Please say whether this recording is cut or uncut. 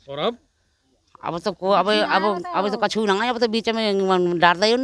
uncut